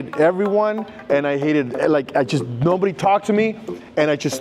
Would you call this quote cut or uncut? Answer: uncut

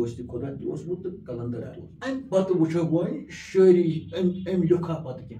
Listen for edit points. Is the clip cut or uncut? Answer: cut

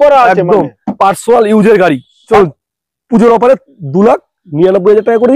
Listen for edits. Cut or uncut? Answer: cut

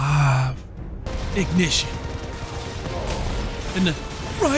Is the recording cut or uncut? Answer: cut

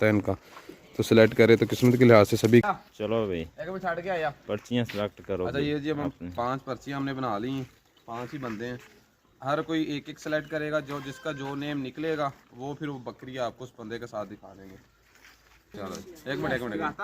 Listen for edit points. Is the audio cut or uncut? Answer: cut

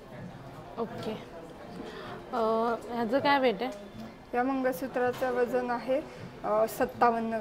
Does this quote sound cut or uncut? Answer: uncut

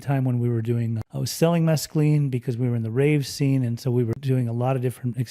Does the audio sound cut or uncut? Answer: cut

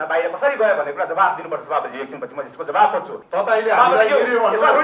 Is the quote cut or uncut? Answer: cut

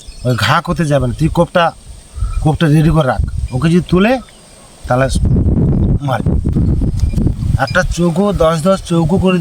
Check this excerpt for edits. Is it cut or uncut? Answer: cut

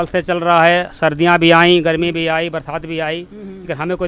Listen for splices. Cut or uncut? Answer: uncut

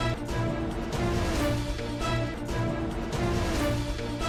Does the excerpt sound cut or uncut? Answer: uncut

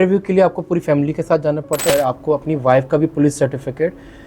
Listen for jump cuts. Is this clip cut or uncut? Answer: cut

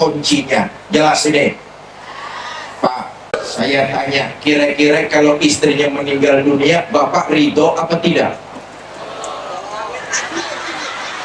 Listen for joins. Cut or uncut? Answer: cut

